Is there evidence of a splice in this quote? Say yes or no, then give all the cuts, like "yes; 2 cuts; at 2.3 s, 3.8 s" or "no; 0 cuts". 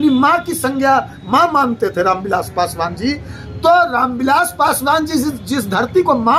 no; 0 cuts